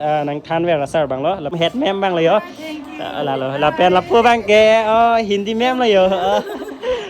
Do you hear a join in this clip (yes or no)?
yes